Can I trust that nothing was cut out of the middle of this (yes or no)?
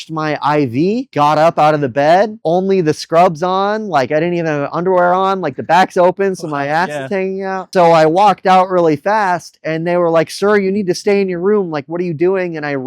no